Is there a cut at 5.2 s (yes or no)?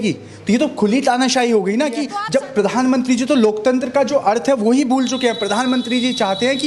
no